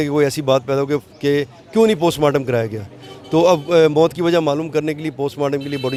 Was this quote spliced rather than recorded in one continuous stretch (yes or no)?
no